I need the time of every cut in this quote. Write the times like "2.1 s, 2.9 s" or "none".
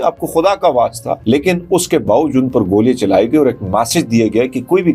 1.1 s